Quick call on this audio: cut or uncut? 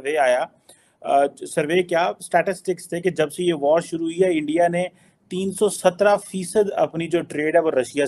uncut